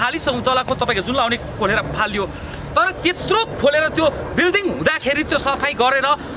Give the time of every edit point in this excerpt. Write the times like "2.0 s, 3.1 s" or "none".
none